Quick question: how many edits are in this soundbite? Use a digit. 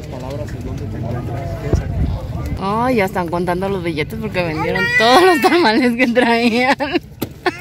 1